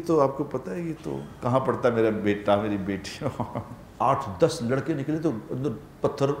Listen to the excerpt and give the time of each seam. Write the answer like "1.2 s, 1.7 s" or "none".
3.8 s